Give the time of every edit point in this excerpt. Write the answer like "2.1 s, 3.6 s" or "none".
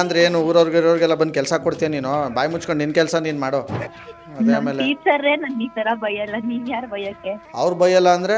3.8 s